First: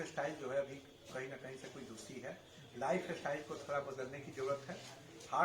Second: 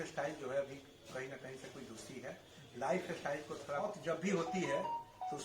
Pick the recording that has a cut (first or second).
second